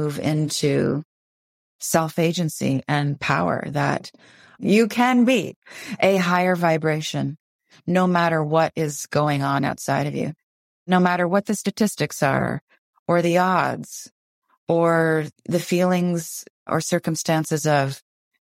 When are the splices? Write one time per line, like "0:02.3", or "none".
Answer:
0:04.6
0:10.5
0:15.4
0:16.7